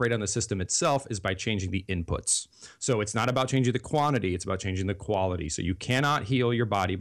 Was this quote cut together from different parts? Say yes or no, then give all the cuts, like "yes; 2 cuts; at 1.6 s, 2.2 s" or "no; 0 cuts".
no; 0 cuts